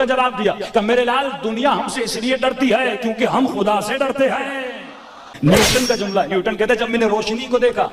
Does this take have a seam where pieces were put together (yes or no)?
yes